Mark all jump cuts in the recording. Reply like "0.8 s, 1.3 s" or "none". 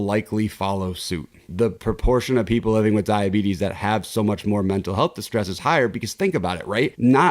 1.5 s